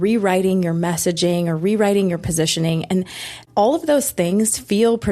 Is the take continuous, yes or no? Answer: no